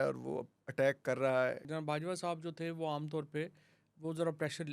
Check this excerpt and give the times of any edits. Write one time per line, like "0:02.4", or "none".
0:01.7